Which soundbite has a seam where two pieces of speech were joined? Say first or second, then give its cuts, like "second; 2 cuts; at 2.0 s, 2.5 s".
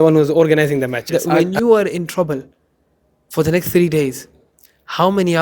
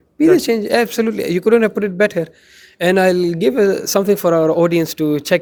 first; 1 cut; at 1.1 s